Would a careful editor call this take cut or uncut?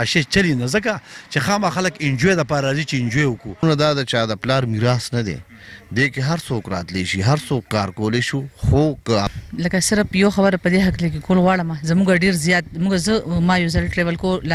cut